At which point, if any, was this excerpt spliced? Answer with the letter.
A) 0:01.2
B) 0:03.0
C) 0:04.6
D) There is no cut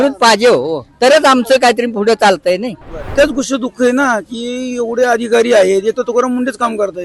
B